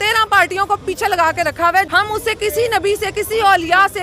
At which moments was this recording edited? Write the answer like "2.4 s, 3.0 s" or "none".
1.9 s

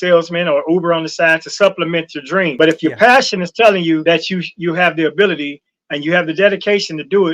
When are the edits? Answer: 2.5 s, 4.0 s

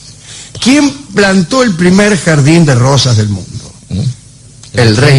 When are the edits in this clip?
2.5 s

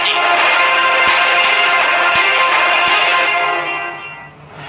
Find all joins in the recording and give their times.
none

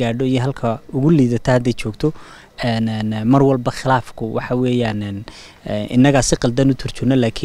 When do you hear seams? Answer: none

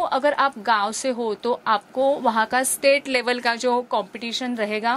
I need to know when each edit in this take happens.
none

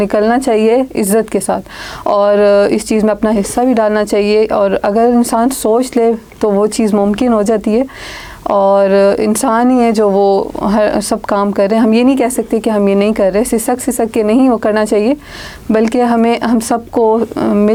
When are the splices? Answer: none

